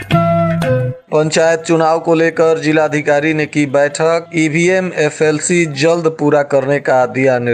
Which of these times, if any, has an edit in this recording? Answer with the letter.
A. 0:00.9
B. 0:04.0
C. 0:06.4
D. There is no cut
A